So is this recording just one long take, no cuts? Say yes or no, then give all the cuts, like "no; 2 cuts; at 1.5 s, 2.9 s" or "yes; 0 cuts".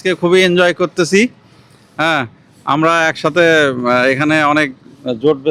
yes; 0 cuts